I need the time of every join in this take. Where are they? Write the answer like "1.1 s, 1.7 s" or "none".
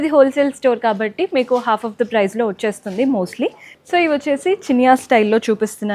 3.7 s